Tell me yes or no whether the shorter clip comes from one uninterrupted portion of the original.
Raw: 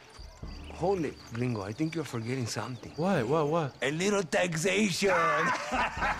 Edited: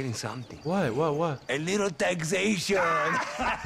yes